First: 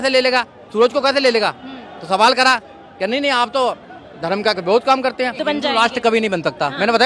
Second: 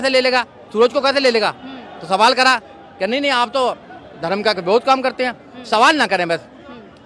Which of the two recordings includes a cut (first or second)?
first